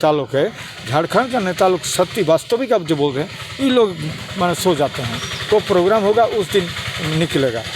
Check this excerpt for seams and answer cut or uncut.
uncut